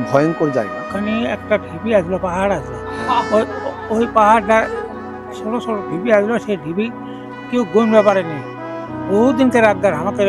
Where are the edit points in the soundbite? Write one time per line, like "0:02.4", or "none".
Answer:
0:00.9